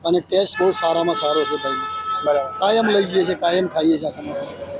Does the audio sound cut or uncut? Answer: uncut